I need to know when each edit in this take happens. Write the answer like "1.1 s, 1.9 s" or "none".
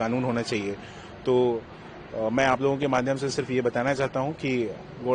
none